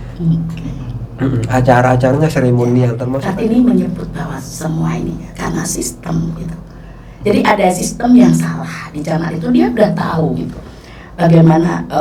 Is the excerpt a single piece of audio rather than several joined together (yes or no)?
no